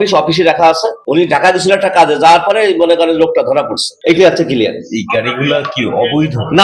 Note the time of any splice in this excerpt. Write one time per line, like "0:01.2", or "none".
0:03.8